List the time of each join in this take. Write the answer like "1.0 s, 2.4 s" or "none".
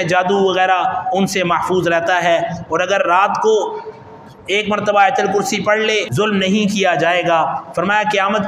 6.1 s